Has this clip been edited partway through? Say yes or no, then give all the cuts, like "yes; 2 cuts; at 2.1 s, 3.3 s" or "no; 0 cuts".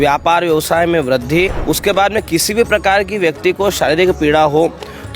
yes; 1 cut; at 1.6 s